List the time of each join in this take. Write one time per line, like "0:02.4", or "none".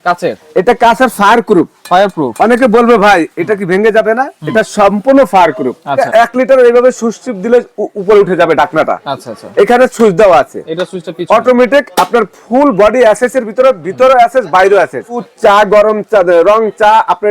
0:06.0
0:15.3